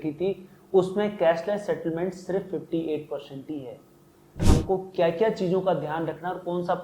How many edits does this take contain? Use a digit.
1